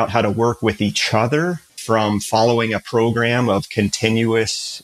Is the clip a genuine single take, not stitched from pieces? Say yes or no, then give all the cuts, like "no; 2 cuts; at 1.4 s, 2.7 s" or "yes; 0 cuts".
no; 1 cut; at 1.7 s